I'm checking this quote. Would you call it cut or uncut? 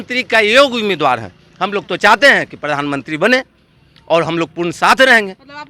uncut